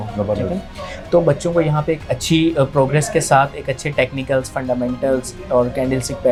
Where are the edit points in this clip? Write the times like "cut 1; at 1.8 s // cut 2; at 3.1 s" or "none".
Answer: none